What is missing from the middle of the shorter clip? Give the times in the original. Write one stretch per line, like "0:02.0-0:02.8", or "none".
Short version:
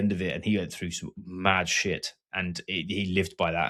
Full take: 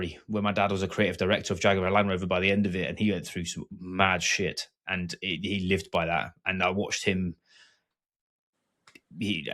none